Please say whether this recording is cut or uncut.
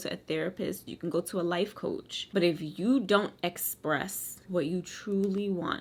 uncut